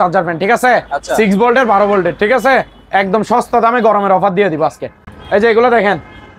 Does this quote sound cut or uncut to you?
uncut